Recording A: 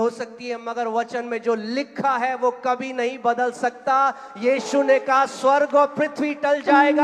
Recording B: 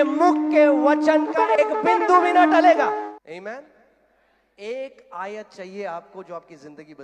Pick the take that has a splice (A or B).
B